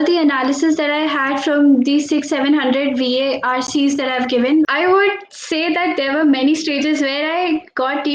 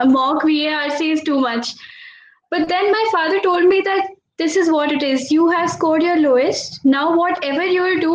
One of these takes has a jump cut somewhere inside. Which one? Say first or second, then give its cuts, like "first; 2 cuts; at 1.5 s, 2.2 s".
first; 1 cut; at 4.7 s